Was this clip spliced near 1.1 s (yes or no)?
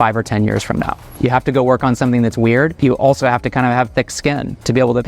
yes